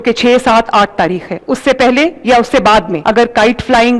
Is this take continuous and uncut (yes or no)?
no